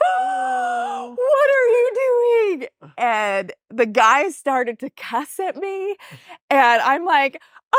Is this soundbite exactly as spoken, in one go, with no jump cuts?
yes; 0 cuts

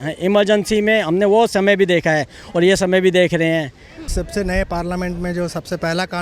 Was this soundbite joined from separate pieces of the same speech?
yes; 1 cut; at 4.1 s

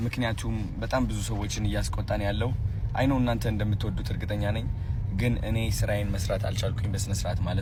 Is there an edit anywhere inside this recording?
no; 0 cuts

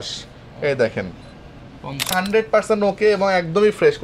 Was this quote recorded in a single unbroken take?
no; 1 cut; at 2.1 s

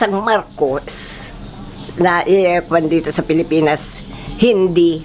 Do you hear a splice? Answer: no; 0 cuts

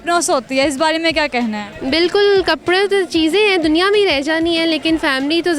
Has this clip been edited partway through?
no; 0 cuts

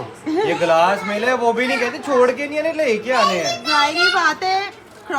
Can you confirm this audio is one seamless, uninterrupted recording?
yes; 0 cuts

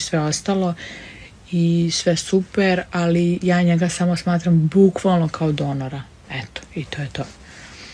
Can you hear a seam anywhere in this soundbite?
no; 0 cuts

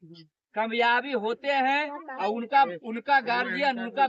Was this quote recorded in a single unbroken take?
yes; 0 cuts

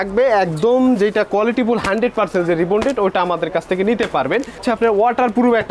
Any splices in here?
yes; 1 cut; at 4.6 s

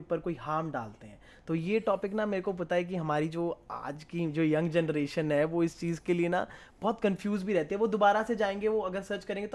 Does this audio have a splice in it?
no; 0 cuts

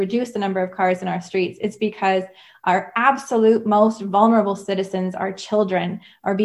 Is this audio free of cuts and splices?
yes; 0 cuts

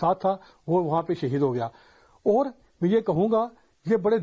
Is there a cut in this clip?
no; 0 cuts

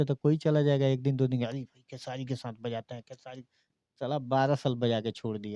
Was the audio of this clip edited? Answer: no; 0 cuts

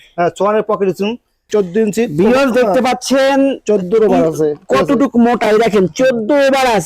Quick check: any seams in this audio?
yes; 1 cut; at 1.4 s

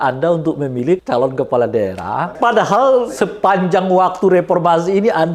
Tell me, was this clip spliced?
yes; 3 cuts; at 1.0 s, 2.3 s, 3.3 s

